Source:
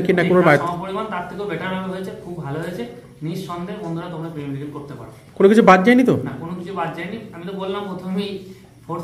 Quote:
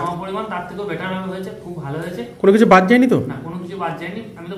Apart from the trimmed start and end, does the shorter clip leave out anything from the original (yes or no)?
yes